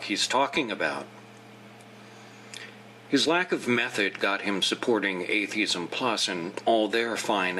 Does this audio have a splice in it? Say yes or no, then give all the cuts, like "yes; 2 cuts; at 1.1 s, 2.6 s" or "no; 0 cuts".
yes; 1 cut; at 4.9 s